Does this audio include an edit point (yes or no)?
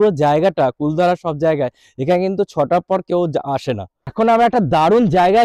yes